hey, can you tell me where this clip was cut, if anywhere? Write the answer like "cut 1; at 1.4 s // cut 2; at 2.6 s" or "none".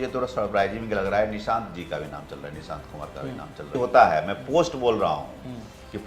cut 1; at 3.7 s